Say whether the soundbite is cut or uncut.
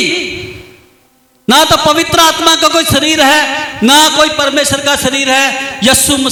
uncut